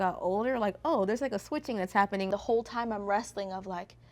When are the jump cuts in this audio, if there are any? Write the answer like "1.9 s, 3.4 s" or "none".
2.3 s